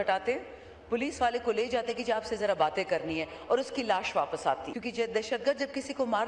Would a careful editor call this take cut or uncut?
cut